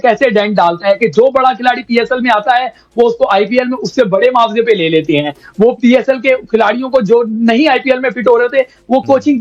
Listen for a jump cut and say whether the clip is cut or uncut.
uncut